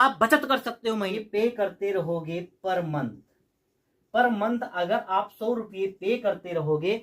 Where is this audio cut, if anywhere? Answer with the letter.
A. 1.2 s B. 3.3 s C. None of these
A